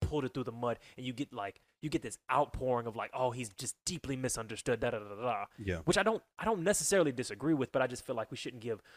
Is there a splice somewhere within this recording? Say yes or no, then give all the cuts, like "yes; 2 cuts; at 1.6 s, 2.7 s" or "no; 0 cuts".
no; 0 cuts